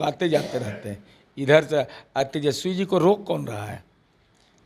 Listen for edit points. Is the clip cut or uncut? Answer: uncut